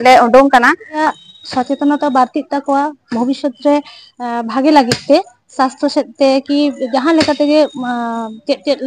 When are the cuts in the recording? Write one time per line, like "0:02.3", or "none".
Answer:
0:01.0